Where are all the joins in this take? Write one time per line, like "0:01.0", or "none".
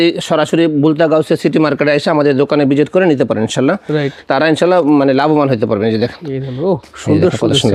none